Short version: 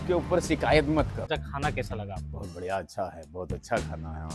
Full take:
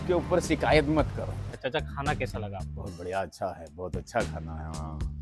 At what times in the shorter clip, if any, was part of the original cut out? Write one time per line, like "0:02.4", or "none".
0:01.3